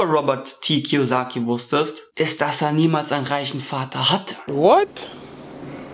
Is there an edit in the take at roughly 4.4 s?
yes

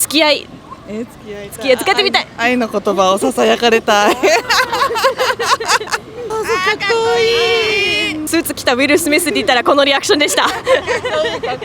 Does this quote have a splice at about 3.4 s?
no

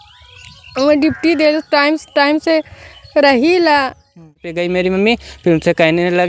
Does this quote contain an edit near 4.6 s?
yes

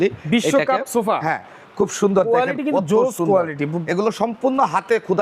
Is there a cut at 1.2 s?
no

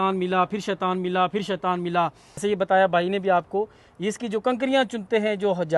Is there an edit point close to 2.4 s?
yes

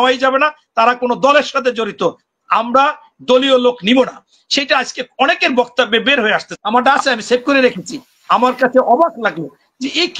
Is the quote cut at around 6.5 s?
yes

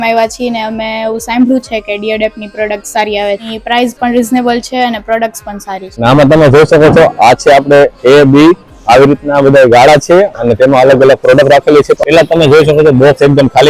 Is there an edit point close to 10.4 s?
no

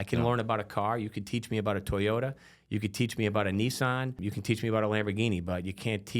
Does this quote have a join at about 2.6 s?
no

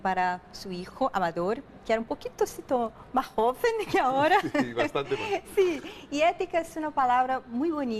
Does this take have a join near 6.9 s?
no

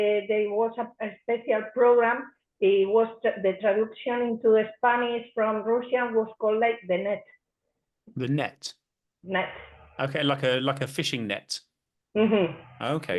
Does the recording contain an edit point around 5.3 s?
no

